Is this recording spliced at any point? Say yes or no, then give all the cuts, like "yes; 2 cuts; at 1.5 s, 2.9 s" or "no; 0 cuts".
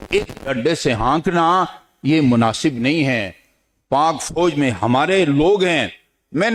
no; 0 cuts